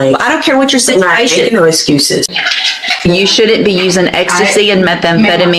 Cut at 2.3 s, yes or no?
yes